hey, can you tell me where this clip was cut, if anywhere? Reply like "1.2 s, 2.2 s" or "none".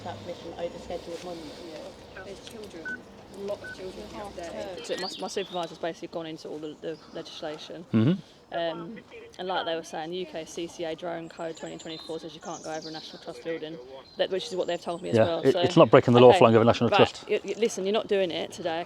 2.0 s, 4.8 s, 14.0 s